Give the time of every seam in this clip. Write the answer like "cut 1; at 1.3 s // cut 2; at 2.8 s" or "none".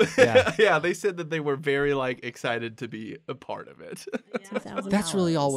cut 1; at 4.4 s